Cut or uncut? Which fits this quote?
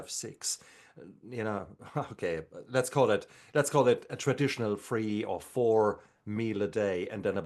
uncut